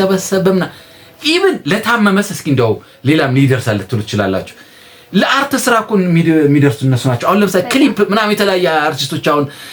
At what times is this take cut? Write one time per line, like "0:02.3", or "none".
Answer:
none